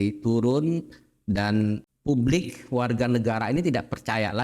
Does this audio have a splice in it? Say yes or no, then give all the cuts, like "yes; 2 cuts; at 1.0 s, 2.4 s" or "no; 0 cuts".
yes; 1 cut; at 1.9 s